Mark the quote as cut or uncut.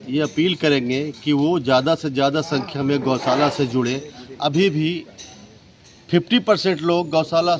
uncut